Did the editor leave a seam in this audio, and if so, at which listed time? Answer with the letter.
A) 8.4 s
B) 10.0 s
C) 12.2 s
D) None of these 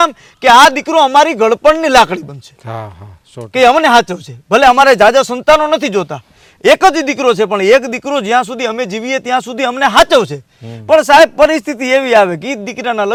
D